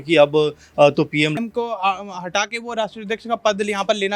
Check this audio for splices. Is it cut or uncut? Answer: cut